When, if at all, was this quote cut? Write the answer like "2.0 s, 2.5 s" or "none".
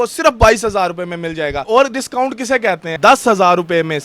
1.6 s, 2.9 s